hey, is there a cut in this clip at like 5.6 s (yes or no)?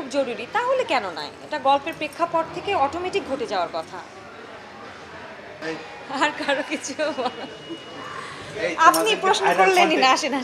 yes